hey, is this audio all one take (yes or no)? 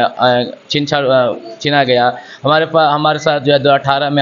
yes